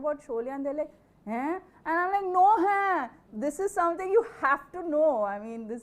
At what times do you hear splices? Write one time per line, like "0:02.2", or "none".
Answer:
none